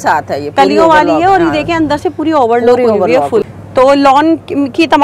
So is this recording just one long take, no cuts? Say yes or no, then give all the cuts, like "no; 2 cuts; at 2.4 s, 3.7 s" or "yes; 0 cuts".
no; 1 cut; at 3.6 s